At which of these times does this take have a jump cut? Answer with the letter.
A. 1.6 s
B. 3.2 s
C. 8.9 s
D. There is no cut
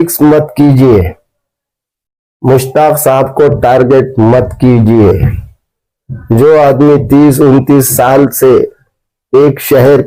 D